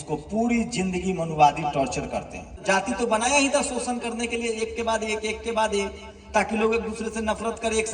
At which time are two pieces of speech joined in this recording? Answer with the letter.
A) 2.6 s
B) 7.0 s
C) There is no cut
A